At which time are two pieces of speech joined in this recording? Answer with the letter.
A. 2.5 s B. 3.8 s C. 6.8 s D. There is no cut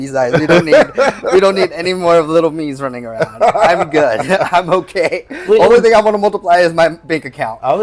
D